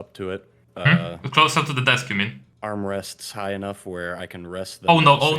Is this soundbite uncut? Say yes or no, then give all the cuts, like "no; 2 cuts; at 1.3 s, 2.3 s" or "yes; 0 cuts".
no; 1 cut; at 2.5 s